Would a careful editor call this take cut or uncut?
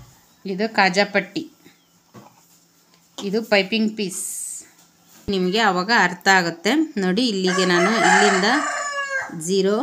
cut